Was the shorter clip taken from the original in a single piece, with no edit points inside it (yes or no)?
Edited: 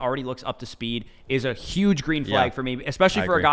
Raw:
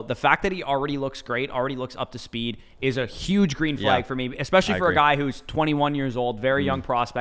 yes